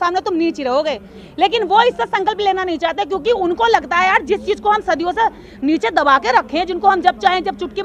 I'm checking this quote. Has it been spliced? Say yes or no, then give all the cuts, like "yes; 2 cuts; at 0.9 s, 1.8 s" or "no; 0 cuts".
no; 0 cuts